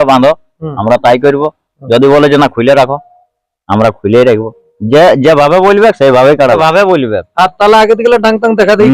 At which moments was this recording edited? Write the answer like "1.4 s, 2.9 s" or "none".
6.6 s